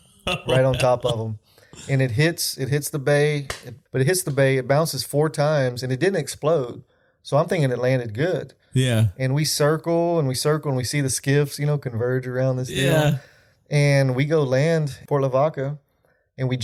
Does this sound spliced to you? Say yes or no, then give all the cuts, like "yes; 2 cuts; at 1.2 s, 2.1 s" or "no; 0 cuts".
no; 0 cuts